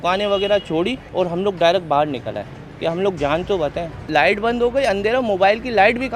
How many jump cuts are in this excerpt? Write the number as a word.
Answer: two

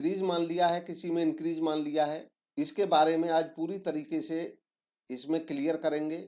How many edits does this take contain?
one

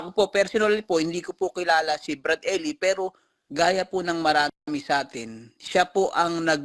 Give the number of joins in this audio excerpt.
zero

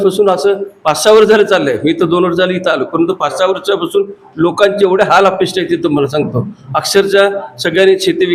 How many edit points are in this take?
zero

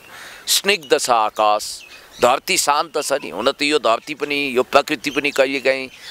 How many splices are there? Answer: zero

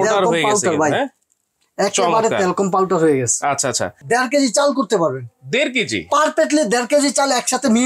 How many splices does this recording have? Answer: one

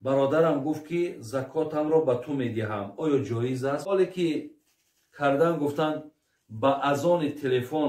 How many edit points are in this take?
one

